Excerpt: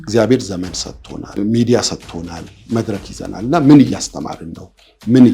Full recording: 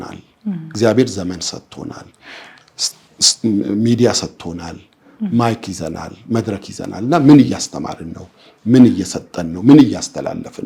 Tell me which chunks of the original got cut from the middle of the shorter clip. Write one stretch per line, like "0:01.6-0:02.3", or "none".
0:02.0-0:03.7
0:04.8-0:06.1